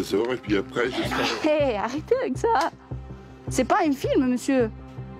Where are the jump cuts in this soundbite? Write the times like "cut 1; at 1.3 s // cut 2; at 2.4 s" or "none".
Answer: none